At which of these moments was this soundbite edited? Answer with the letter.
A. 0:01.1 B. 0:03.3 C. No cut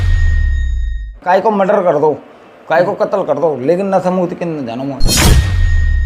A